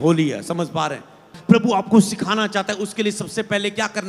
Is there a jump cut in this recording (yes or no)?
yes